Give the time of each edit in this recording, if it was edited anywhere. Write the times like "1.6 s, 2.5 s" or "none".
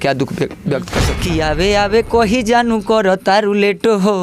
1.1 s